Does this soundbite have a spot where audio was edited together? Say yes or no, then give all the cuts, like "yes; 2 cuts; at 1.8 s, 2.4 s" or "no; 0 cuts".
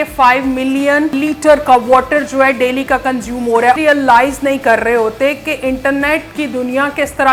yes; 2 cuts; at 1.1 s, 3.8 s